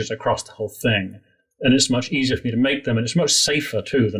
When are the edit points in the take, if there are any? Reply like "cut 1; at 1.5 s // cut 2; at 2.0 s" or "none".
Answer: none